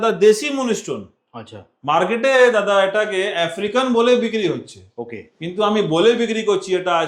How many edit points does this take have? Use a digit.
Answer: 0